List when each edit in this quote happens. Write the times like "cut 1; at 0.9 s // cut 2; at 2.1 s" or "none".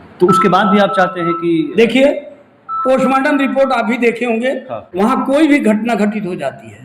cut 1; at 4.6 s